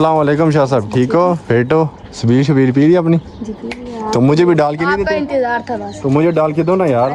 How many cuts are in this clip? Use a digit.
1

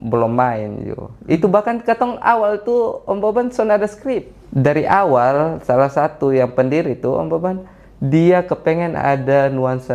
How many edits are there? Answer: 1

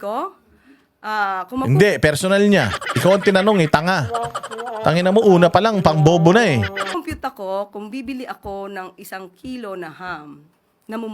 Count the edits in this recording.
1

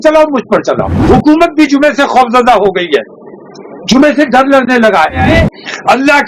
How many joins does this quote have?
2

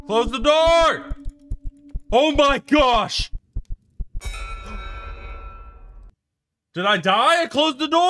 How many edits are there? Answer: 1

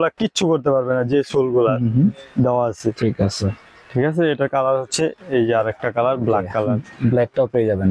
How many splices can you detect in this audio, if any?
0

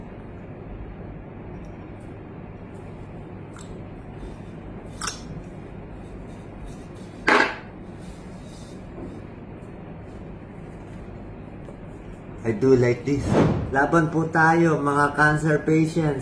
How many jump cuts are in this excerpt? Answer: 1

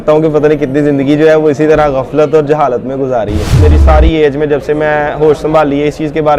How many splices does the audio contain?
1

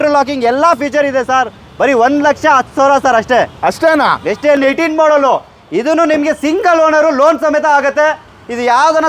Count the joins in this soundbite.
1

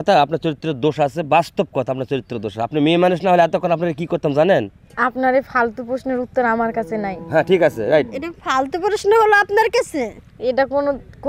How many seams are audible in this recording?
1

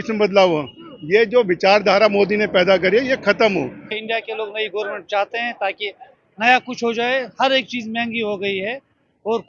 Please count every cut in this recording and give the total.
1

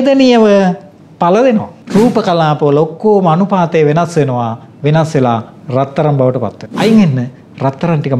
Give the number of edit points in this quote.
2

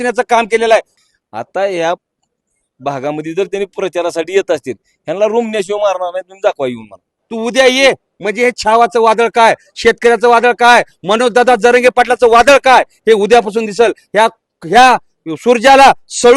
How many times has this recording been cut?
2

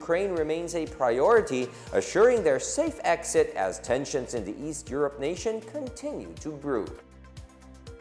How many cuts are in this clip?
1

